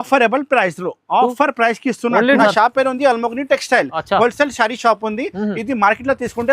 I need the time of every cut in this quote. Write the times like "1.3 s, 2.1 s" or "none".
2.4 s